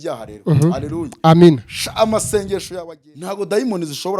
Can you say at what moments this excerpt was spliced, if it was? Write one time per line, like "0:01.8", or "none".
0:02.7